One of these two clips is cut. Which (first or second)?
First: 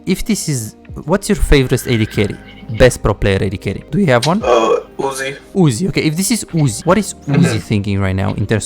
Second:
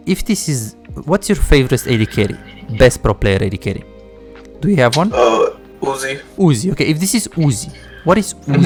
first